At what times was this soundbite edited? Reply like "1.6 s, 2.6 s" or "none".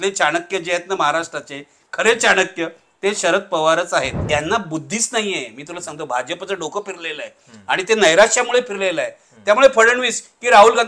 4.2 s